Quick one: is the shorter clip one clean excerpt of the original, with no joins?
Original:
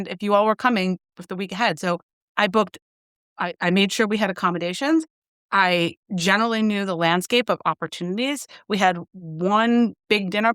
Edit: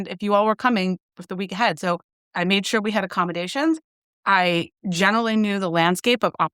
no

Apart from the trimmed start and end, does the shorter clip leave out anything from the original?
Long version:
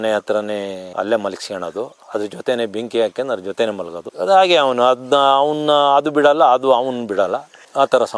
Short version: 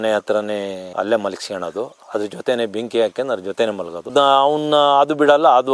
yes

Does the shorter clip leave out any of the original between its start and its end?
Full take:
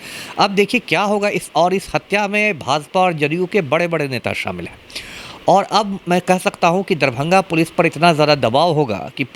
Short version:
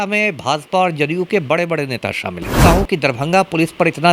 yes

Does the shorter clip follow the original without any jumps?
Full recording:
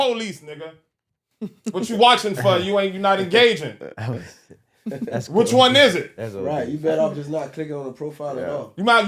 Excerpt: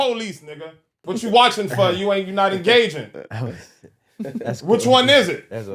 no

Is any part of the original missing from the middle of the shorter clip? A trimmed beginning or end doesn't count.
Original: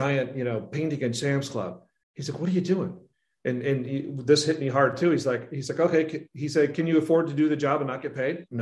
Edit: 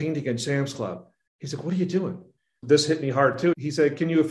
yes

